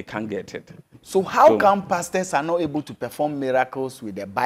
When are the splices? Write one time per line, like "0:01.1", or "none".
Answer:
0:01.0